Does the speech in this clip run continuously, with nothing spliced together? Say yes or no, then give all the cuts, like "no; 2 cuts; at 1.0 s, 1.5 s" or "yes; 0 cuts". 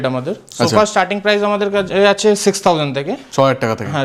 yes; 0 cuts